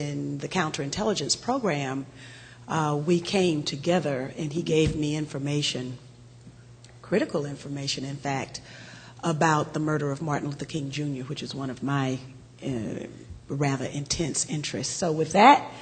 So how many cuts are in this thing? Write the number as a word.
one